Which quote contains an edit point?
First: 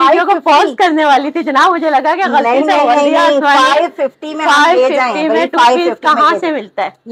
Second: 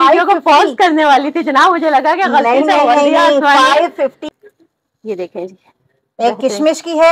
second; 1 cut; at 4.3 s

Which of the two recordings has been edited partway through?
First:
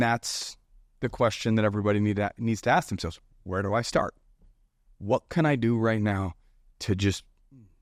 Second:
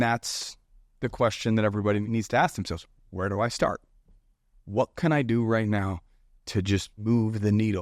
second; 2 cuts; at 2.0 s, 6.9 s

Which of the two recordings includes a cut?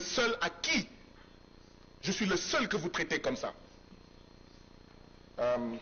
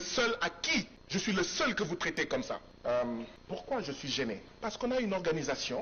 second; 4 cuts; at 1.0 s, 2.7 s, 3.4 s, 4.5 s

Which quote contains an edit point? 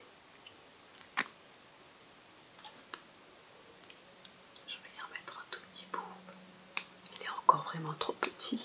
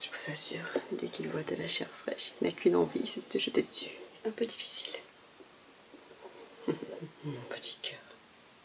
first; 1 cut; at 0.9 s

